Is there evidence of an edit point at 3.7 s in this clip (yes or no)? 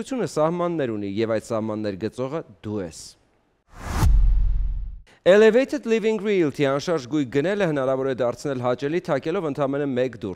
yes